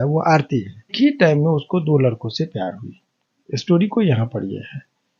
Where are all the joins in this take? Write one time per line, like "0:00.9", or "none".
0:00.9